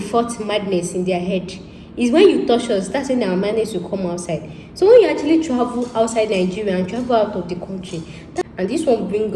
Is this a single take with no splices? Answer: no; 1 cut; at 8.4 s

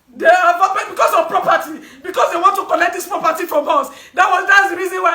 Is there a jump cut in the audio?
no; 0 cuts

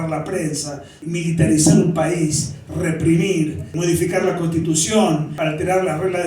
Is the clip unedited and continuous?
no; 3 cuts; at 0.9 s, 3.7 s, 5.4 s

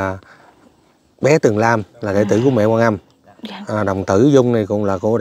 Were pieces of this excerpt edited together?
no; 0 cuts

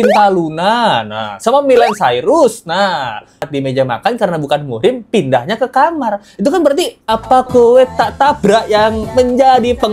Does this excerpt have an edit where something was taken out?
yes; 1 cut; at 3.4 s

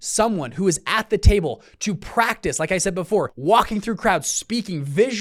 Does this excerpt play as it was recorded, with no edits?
no; 1 cut; at 3.3 s

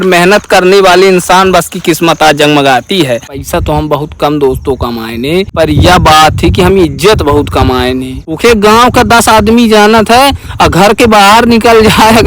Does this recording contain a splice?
yes; 3 cuts; at 3.3 s, 5.5 s, 8.2 s

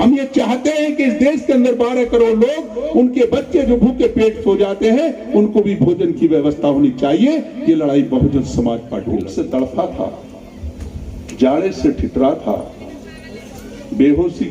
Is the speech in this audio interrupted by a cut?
yes; 1 cut; at 9.0 s

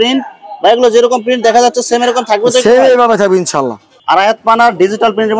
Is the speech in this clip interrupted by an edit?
yes; 1 cut; at 3.9 s

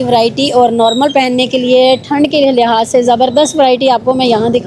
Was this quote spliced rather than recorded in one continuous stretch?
no; 0 cuts

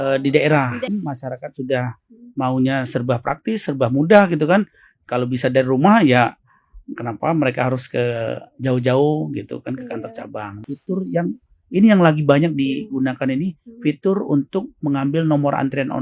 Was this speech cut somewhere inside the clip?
yes; 2 cuts; at 0.9 s, 10.6 s

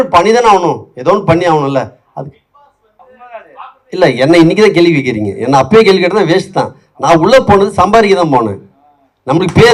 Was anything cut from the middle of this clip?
yes; 1 cut; at 3.1 s

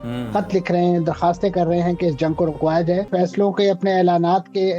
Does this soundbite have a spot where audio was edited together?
yes; 1 cut; at 3.1 s

